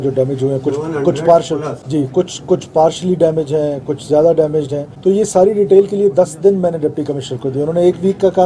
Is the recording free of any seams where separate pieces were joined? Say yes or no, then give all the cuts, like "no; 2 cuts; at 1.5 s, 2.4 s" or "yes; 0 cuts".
no; 2 cuts; at 1.8 s, 4.8 s